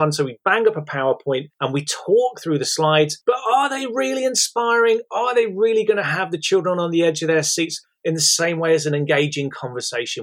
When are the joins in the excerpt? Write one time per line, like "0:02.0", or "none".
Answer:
none